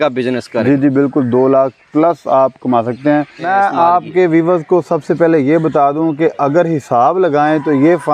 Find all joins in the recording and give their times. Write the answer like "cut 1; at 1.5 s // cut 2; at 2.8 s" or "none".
cut 1; at 3.4 s